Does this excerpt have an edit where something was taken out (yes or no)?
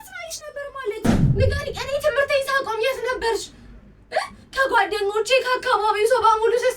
yes